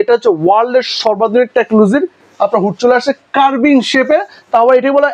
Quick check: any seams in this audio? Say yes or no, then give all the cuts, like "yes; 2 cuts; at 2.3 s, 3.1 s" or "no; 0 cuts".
no; 0 cuts